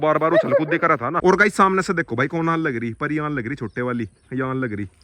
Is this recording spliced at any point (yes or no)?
yes